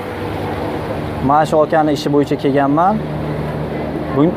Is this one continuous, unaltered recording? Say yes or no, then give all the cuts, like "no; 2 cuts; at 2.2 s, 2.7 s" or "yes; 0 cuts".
yes; 0 cuts